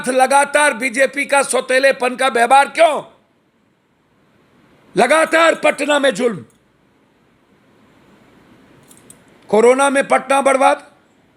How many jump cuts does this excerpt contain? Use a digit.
0